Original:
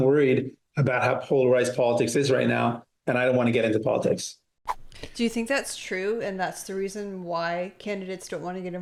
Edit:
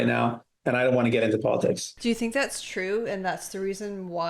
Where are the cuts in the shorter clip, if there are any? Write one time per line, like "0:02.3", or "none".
0:01.9